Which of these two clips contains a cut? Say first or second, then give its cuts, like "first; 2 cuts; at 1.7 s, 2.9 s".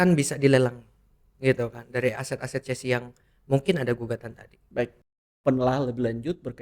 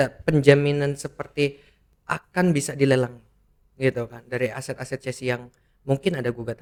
first; 1 cut; at 5.3 s